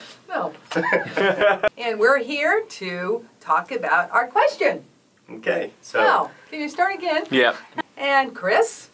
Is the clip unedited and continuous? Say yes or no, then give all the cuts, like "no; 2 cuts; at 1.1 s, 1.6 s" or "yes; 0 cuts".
no; 2 cuts; at 1.7 s, 7.7 s